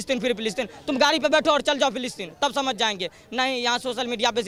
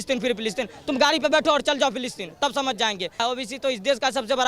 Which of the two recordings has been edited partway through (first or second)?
second